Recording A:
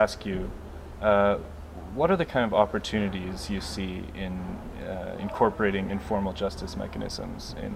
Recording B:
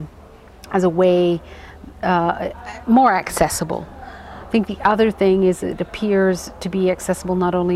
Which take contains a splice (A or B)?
A